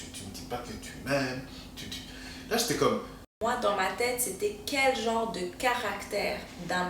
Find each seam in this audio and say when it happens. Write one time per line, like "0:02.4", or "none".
0:03.4